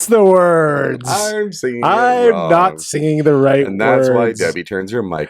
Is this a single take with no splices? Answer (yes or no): yes